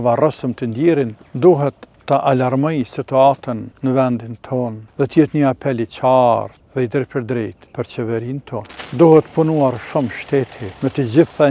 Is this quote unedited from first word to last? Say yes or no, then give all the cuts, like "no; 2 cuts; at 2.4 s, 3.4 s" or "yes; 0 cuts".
no; 8 cuts; at 1.2 s, 1.9 s, 3.7 s, 4.8 s, 6.6 s, 7.6 s, 8.8 s, 10.6 s